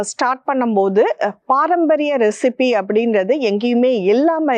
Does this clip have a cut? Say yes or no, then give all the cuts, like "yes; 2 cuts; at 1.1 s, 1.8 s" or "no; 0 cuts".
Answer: no; 0 cuts